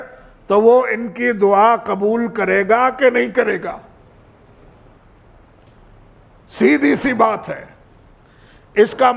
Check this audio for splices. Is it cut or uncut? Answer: uncut